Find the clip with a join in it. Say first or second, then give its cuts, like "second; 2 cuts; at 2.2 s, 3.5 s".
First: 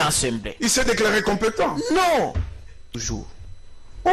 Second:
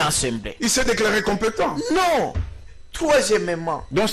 first; 1 cut; at 2.9 s